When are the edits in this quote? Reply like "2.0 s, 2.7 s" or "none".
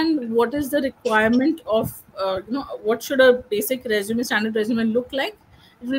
none